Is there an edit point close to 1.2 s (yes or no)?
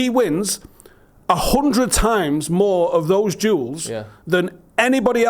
no